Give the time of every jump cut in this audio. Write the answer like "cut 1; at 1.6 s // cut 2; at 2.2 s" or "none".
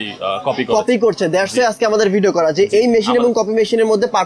none